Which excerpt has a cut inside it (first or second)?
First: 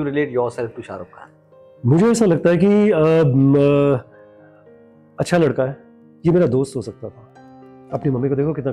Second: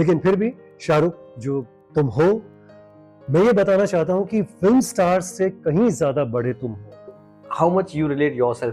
second